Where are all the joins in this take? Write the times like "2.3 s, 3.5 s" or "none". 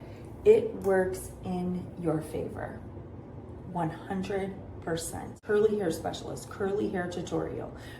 5.3 s